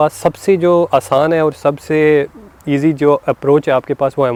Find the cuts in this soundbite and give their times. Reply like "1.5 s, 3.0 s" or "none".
none